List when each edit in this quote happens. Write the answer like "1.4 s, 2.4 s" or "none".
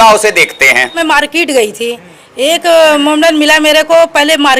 1.0 s

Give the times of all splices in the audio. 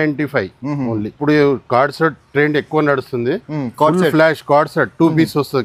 1.1 s

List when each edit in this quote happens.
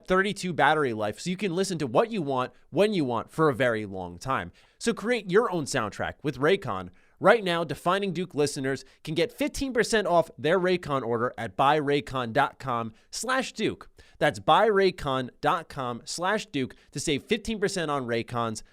4.6 s

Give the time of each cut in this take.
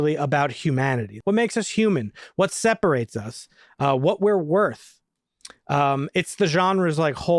1.1 s

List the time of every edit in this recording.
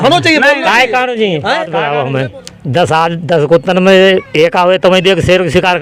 1.8 s

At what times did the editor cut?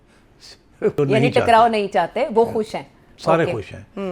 1.0 s

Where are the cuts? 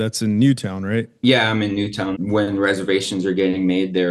1.2 s, 2.2 s

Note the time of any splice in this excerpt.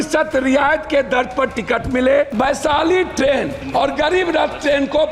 2.3 s, 3.6 s

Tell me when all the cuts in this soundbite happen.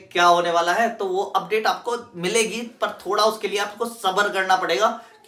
none

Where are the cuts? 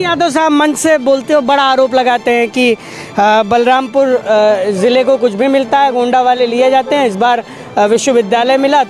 none

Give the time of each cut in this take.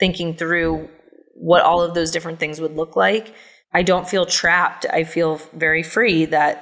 none

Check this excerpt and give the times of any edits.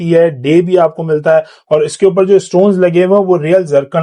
none

